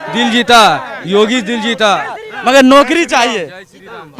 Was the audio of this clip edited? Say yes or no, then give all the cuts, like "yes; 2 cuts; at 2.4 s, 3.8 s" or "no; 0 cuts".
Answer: no; 0 cuts